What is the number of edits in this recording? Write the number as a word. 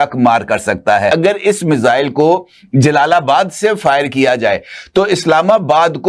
one